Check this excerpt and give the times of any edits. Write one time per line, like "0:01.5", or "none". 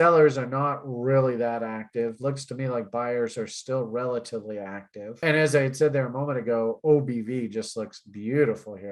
0:05.2